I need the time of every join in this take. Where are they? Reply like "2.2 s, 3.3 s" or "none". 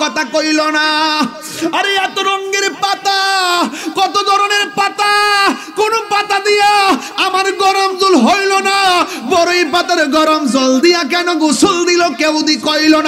none